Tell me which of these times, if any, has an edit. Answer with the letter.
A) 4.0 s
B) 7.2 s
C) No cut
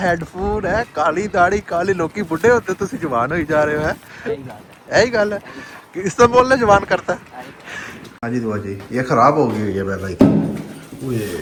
C